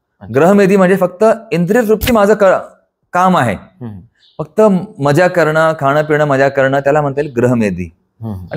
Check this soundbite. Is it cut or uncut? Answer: uncut